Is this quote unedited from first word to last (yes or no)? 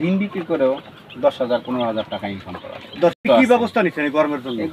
no